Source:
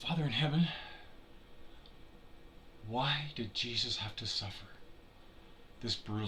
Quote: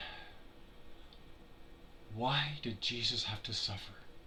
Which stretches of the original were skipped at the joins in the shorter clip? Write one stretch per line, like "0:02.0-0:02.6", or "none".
none